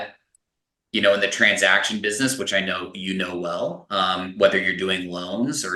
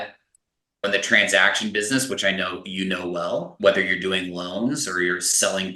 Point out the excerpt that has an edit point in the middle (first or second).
second